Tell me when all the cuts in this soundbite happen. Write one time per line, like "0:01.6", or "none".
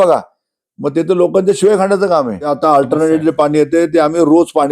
0:02.5